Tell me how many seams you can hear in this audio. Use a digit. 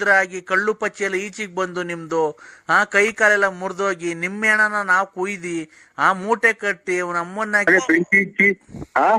1